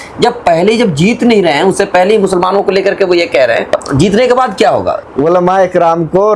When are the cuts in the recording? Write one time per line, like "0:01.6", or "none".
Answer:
0:03.8
0:05.0